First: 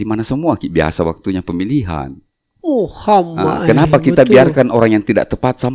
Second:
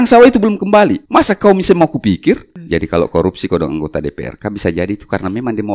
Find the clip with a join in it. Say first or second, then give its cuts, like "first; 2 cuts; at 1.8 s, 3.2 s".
second; 2 cuts; at 1.0 s, 2.5 s